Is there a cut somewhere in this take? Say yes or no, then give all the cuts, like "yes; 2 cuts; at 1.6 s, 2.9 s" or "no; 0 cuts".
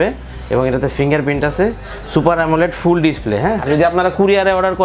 yes; 1 cut; at 3.6 s